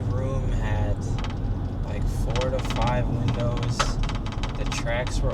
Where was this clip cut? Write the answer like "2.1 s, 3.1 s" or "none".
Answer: none